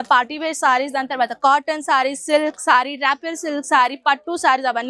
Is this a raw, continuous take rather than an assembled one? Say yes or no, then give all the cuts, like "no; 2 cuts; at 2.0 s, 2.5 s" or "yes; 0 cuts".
yes; 0 cuts